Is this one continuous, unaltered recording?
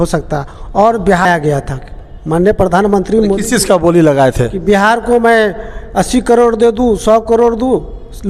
no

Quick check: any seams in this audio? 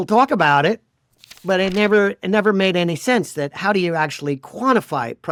no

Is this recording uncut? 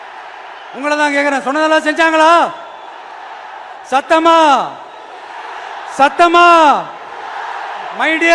yes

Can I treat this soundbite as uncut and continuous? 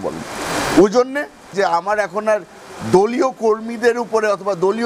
no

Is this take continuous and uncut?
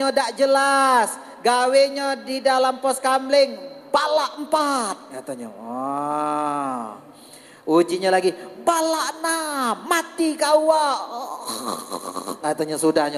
yes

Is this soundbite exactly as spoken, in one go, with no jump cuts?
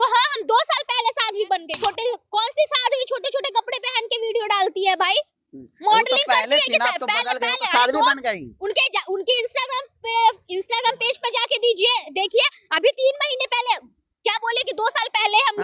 no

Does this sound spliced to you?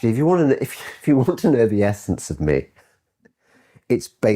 no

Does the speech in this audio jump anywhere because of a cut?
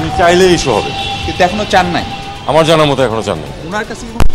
no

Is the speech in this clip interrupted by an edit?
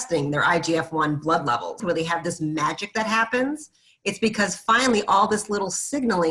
yes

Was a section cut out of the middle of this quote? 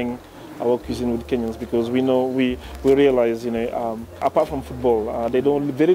yes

